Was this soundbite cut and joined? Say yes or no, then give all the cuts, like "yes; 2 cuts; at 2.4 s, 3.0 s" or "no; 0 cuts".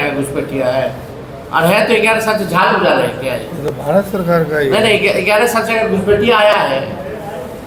no; 0 cuts